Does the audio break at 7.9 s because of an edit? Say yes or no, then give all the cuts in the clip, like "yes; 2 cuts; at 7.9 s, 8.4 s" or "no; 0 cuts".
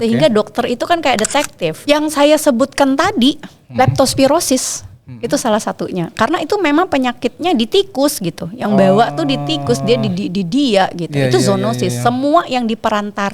no; 1 cut; at 1.8 s